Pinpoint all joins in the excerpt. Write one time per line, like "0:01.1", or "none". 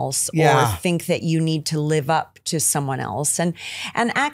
none